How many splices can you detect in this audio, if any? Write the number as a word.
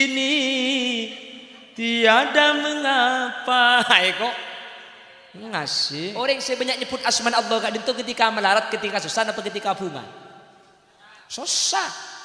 one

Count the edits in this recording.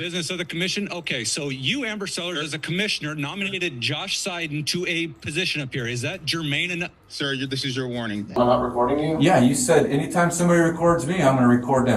one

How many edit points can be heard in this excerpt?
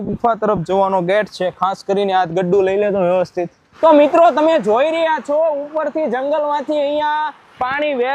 one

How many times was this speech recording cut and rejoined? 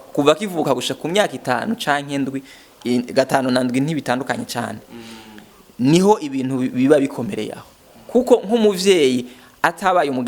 zero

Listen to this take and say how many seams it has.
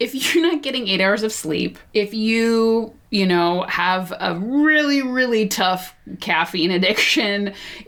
two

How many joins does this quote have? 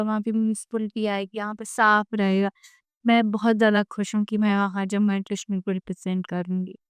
zero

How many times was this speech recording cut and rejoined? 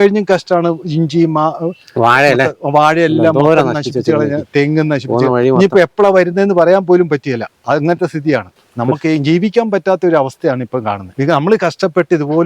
two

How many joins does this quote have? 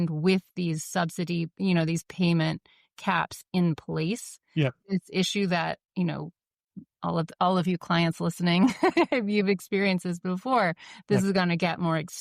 zero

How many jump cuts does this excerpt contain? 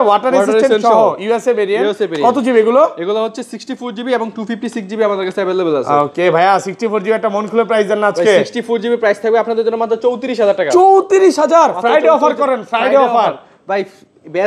zero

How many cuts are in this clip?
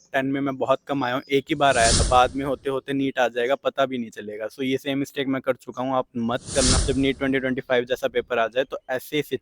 two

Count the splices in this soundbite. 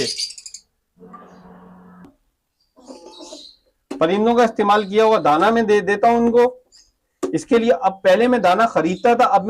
one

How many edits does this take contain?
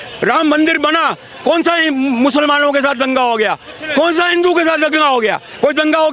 zero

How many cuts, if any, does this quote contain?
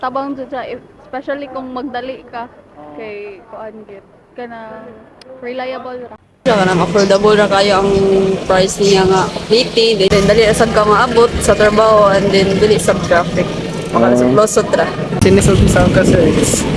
two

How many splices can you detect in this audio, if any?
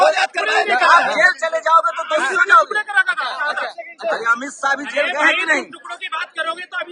zero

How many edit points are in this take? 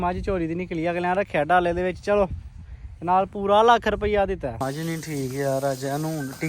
one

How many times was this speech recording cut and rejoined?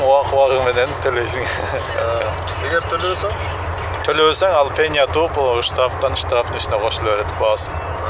zero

